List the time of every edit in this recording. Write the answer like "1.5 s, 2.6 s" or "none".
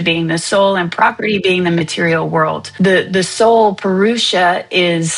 2.6 s